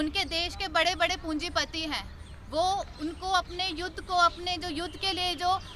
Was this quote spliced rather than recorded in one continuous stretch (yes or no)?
no